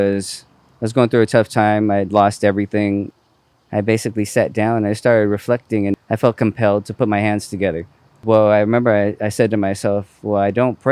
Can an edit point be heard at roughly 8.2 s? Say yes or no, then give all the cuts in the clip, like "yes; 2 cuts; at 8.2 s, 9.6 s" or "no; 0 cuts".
yes; 3 cuts; at 3.1 s, 6.0 s, 8.2 s